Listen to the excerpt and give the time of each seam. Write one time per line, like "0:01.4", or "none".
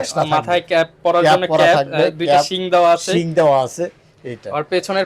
none